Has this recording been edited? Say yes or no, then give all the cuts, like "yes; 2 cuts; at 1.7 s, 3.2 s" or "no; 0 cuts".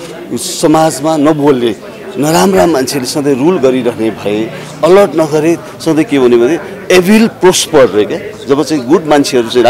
no; 0 cuts